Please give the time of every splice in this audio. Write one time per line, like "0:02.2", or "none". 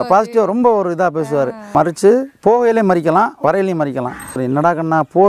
0:01.7
0:04.4